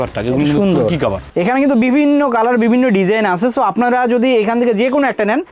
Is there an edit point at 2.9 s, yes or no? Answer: no